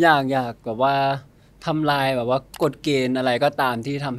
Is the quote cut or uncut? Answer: uncut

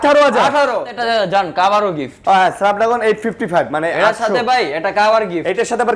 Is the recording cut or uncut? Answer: cut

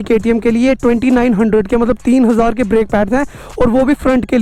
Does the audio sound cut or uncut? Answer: uncut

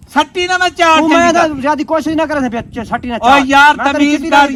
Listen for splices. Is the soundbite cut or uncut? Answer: uncut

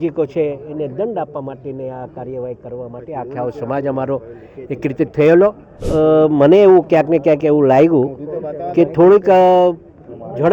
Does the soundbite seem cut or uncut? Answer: cut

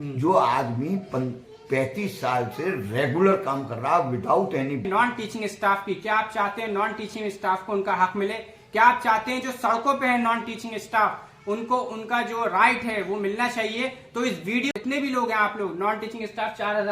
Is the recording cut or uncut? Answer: cut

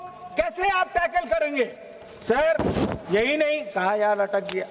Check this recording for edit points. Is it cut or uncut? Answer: uncut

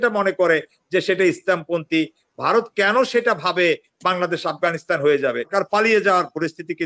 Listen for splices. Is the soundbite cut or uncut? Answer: cut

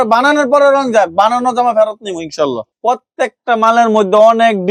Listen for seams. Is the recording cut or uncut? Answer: uncut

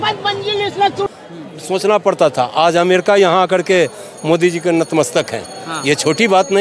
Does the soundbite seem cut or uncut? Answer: cut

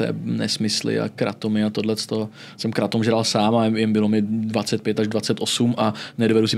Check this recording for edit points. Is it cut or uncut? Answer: uncut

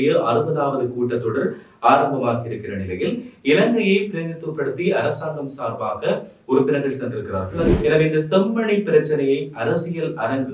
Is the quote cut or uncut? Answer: cut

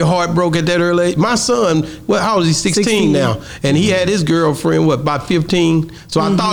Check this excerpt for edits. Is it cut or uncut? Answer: uncut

